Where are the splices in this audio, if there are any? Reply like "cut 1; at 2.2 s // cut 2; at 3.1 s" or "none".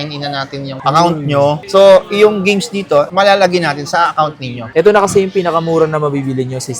cut 1; at 4.6 s